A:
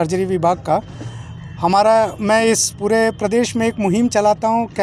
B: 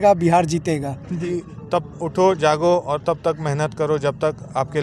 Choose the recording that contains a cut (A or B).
B